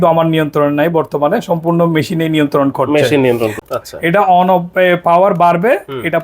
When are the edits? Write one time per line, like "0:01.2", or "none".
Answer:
0:03.6